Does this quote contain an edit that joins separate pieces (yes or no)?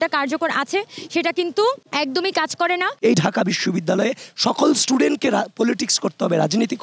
yes